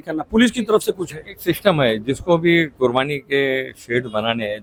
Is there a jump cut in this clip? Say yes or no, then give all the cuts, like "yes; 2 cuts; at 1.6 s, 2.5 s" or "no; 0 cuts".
no; 0 cuts